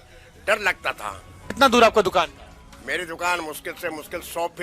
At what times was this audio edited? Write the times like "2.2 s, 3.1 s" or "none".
1.6 s